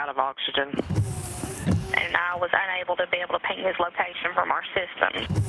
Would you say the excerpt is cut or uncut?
cut